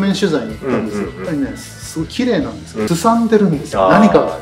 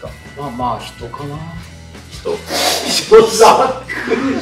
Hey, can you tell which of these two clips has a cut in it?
first; 1 cut; at 2.9 s

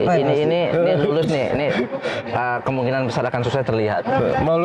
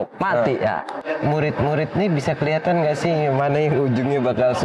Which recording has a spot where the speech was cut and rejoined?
second; 1 cut; at 0.9 s

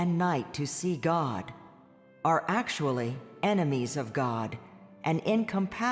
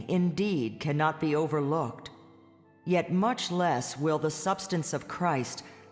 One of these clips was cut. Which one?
second; 1 cut; at 1.2 s

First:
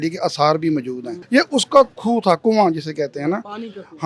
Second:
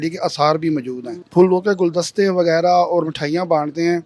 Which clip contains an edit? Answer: second; 1 cut; at 1.2 s

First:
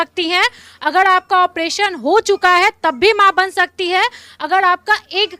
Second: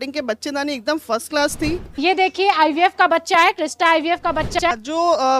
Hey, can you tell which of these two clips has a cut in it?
second; 2 cuts; at 2.0 s, 4.6 s

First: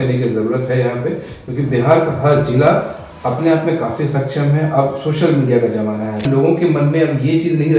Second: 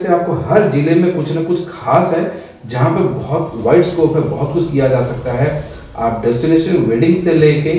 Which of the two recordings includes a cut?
first; 1 cut; at 6.2 s

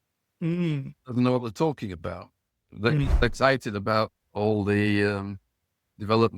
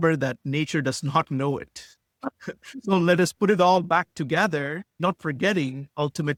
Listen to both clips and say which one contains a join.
first; 1 cut; at 3.2 s

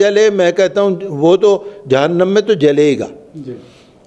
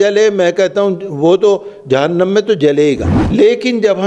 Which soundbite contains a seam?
second; 1 cut; at 3.1 s

